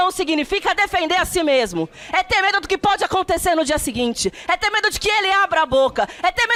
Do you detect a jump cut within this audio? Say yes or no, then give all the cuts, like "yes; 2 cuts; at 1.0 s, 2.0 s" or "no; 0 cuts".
no; 0 cuts